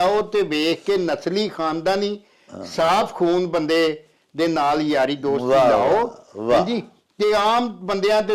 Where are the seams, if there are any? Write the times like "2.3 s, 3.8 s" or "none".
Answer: none